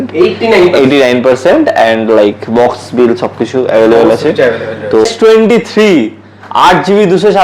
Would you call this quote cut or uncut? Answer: cut